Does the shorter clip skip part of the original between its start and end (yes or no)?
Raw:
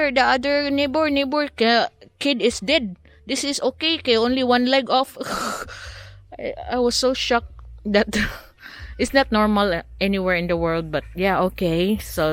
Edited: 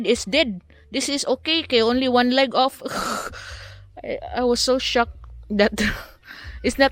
no